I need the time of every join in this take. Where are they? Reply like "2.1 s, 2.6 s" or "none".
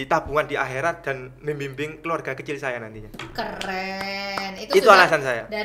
none